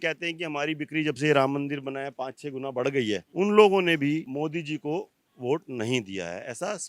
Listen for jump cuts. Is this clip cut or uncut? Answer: uncut